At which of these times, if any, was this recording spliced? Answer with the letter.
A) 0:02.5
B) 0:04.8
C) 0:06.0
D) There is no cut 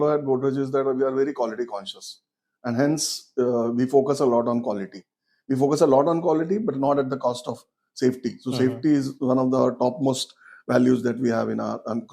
D